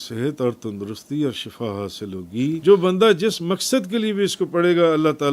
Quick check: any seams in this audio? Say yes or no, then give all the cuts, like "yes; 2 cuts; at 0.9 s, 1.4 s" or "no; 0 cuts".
yes; 1 cut; at 2.6 s